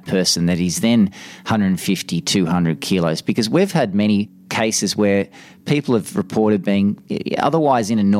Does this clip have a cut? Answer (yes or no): yes